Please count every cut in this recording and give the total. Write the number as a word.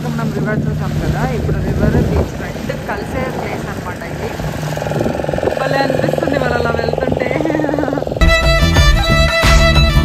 one